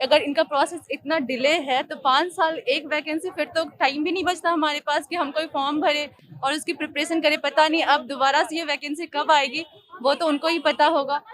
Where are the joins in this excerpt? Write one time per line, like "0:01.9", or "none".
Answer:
none